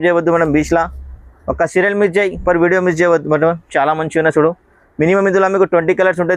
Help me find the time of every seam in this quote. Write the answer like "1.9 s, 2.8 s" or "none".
none